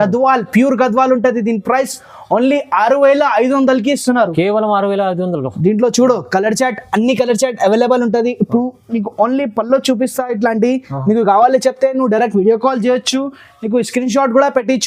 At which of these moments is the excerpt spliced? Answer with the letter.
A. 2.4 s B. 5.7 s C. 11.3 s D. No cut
D